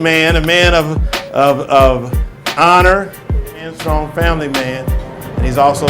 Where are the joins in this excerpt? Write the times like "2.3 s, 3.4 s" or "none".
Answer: 3.7 s